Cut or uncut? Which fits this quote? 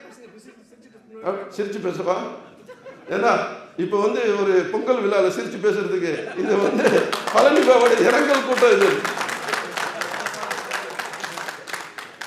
uncut